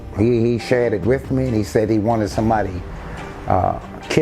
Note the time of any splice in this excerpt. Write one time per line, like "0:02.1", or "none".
none